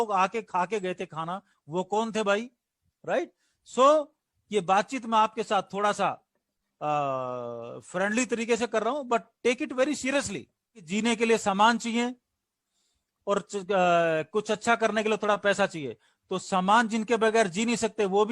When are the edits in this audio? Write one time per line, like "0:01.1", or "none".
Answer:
0:10.9